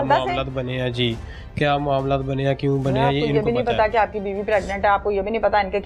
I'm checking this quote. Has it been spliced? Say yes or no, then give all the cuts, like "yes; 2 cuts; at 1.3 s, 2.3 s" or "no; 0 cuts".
no; 0 cuts